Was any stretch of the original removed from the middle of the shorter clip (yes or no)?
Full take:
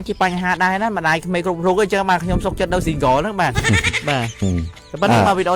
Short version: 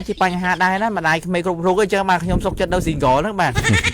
no